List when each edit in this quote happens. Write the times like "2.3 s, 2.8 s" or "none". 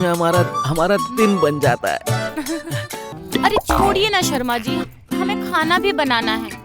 3.1 s